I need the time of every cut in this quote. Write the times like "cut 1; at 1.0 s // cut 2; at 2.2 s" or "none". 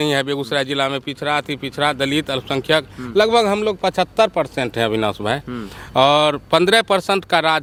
none